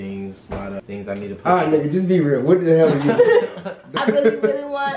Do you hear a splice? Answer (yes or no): yes